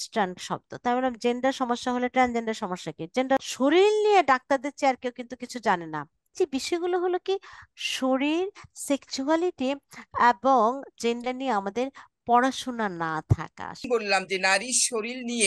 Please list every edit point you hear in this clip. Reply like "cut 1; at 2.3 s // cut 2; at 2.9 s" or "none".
cut 1; at 3.4 s // cut 2; at 6.3 s // cut 3; at 13.9 s